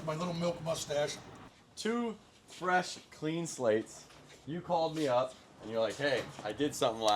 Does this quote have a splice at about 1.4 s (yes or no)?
yes